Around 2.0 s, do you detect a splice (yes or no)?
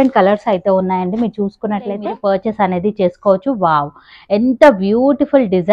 yes